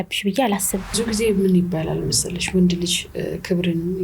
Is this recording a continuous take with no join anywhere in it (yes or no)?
no